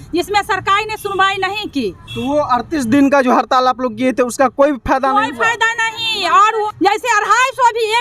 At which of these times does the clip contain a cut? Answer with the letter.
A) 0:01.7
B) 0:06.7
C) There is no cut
B